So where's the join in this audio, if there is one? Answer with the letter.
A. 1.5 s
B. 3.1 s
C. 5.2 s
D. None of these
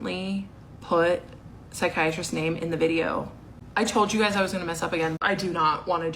C